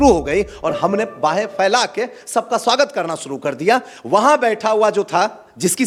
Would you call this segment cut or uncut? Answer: uncut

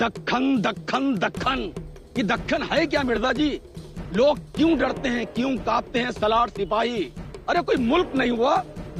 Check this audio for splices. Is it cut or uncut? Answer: uncut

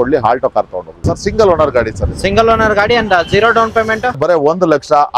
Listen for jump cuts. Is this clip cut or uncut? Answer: cut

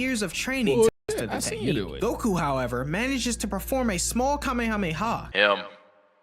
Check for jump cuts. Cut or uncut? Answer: cut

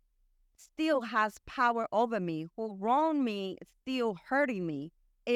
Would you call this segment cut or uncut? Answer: uncut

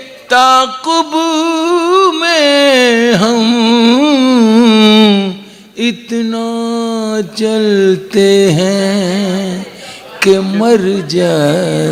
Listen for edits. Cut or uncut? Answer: uncut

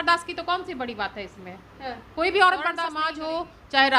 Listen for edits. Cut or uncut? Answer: cut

